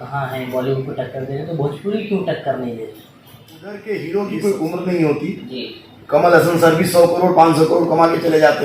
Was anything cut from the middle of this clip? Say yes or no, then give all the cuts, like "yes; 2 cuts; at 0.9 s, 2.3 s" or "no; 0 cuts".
yes; 1 cut; at 3.8 s